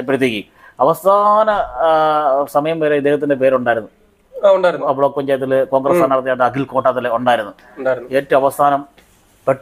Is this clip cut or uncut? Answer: uncut